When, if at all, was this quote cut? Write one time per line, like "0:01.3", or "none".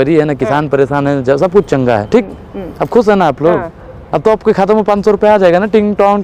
none